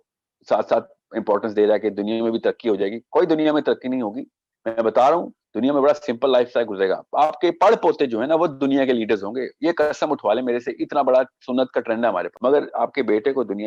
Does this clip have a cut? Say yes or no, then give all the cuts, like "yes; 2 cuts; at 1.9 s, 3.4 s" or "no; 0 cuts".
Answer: yes; 1 cut; at 12.3 s